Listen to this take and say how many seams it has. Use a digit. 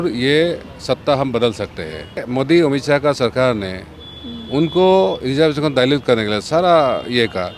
1